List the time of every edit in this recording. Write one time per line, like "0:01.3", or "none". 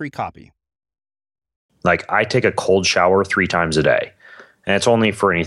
0:01.6